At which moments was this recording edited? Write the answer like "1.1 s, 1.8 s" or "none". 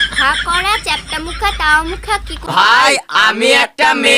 2.4 s